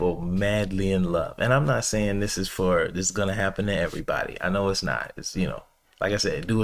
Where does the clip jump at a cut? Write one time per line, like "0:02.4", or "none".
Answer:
none